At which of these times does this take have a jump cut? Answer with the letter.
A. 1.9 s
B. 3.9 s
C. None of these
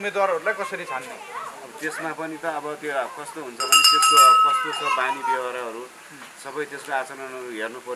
C